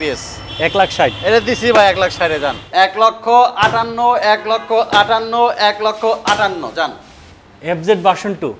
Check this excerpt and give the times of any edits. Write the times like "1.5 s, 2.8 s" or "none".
2.9 s